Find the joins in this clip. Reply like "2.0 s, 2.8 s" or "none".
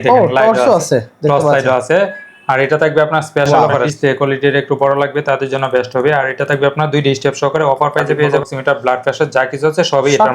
3.5 s, 8.4 s